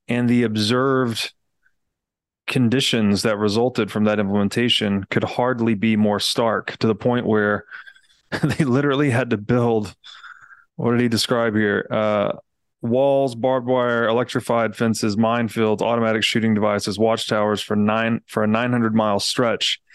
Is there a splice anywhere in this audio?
no; 0 cuts

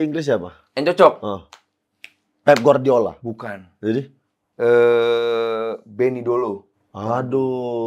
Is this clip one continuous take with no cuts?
yes; 0 cuts

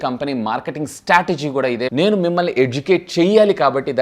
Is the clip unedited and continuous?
no; 1 cut; at 1.9 s

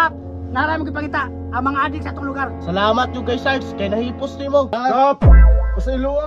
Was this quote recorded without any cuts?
no; 1 cut; at 4.7 s

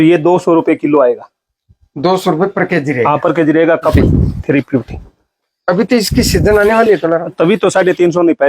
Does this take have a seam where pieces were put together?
yes; 1 cut; at 3.9 s

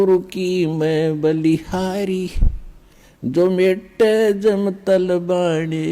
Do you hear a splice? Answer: no; 0 cuts

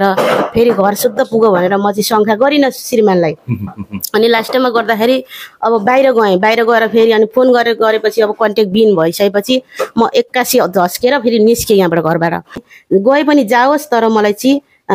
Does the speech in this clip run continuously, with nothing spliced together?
no; 1 cut; at 12.7 s

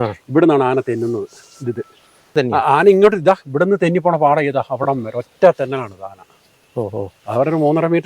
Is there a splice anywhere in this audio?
yes; 1 cut; at 2.3 s

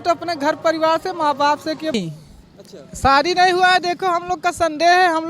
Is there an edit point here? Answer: yes; 1 cut; at 1.9 s

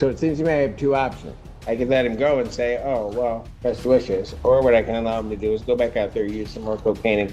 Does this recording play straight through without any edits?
no; 1 cut; at 3.5 s

